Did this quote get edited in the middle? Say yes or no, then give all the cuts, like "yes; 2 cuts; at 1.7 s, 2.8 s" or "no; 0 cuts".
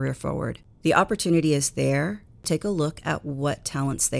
yes; 1 cut; at 2.4 s